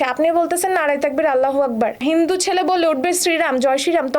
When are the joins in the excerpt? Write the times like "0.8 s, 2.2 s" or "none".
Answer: 2.0 s